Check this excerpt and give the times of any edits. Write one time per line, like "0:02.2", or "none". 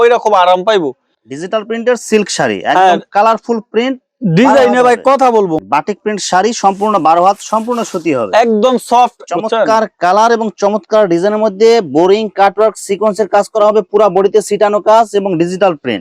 0:01.1
0:05.6
0:09.2